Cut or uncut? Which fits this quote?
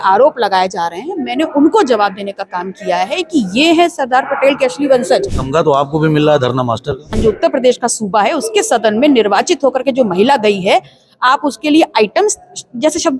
cut